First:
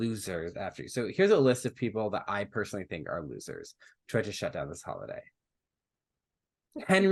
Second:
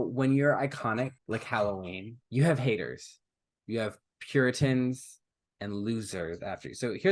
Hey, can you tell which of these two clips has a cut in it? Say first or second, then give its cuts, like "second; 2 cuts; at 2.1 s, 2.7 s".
second; 2 cuts; at 1.2 s, 2.1 s